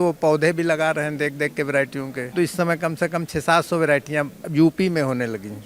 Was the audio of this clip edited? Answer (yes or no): yes